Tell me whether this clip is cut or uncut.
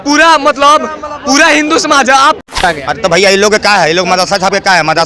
cut